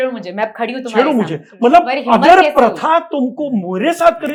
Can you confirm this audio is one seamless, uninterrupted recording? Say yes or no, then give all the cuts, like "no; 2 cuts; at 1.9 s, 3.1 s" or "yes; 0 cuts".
yes; 0 cuts